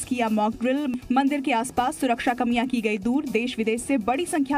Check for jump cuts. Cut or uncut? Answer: uncut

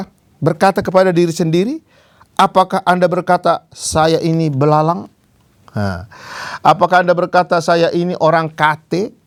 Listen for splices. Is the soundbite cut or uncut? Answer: uncut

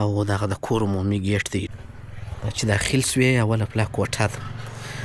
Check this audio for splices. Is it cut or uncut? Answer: cut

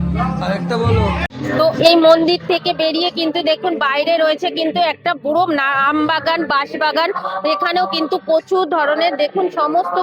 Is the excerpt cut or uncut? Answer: uncut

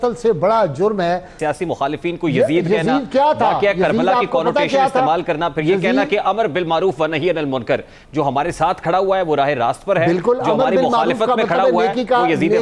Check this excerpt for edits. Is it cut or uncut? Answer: cut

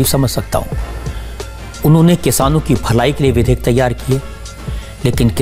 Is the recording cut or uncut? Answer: uncut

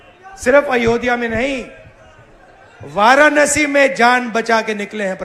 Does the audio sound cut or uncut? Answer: uncut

